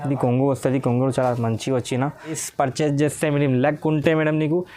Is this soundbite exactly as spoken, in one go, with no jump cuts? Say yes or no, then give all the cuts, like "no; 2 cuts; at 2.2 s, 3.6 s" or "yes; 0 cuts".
no; 1 cut; at 2.4 s